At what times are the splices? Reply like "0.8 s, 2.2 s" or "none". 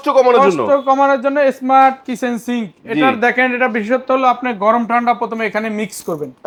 none